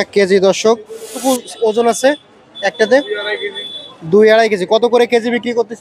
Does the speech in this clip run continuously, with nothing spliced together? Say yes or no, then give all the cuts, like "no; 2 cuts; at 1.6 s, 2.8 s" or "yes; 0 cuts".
no; 1 cut; at 1.1 s